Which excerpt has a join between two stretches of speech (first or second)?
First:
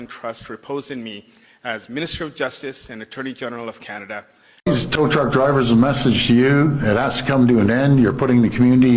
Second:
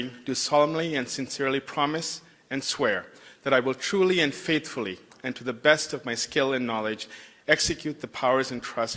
first